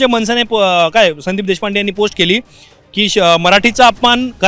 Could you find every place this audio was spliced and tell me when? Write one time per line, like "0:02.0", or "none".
none